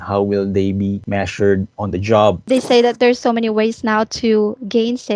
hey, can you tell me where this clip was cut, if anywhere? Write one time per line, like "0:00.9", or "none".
0:01.0
0:02.4